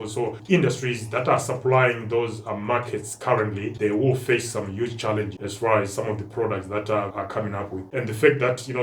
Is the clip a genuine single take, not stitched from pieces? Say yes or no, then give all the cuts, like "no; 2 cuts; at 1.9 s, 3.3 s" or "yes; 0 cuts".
no; 1 cut; at 7.1 s